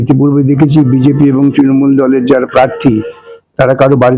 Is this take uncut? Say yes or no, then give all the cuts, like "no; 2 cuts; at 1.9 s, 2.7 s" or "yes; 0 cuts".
yes; 0 cuts